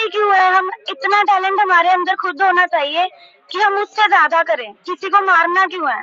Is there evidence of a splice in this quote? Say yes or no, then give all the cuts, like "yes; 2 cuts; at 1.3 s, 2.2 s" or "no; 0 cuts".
no; 0 cuts